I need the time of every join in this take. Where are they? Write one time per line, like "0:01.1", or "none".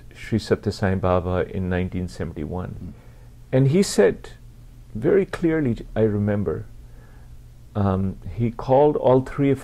0:02.9